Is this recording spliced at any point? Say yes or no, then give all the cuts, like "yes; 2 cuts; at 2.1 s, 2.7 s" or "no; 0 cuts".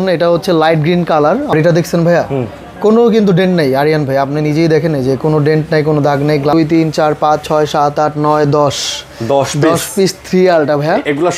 yes; 2 cuts; at 1.5 s, 6.5 s